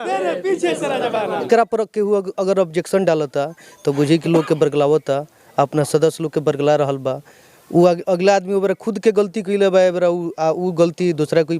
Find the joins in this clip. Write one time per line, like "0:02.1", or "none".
0:01.5